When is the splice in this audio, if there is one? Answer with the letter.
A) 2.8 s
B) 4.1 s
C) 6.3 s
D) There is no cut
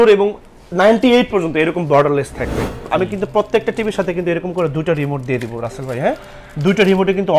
A